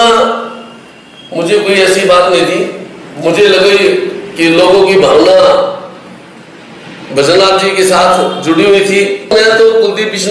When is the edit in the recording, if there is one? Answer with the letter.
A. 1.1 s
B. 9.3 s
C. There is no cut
B